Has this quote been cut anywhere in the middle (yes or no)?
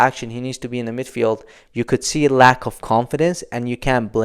yes